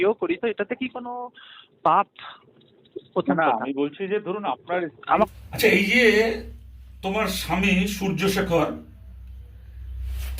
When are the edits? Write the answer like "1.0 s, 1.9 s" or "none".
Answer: 5.3 s